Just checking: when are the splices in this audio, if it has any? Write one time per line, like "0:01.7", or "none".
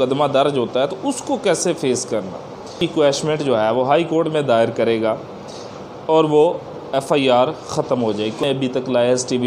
0:02.8
0:08.4